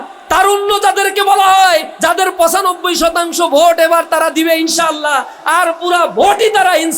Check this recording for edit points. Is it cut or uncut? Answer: cut